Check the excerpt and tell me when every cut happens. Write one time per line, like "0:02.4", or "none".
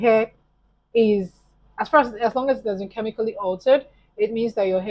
none